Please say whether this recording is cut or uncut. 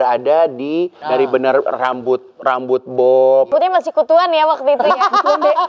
cut